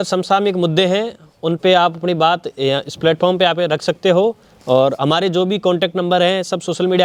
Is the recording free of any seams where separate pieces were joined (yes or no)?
yes